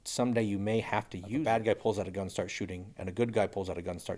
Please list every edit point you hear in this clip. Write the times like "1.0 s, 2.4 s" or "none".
1.4 s